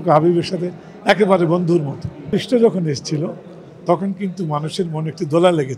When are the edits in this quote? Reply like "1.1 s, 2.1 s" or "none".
2.3 s